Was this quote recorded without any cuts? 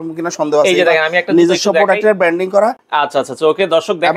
yes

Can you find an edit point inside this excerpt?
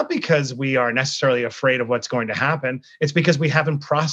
no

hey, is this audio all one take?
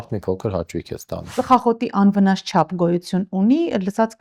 no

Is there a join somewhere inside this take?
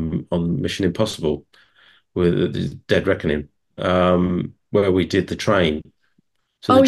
no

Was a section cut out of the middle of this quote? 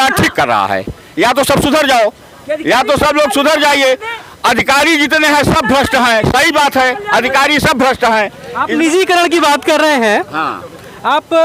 no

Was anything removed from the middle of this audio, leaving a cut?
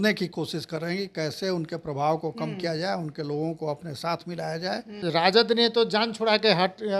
yes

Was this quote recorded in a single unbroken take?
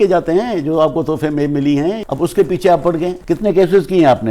no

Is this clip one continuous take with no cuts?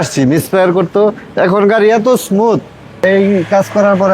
no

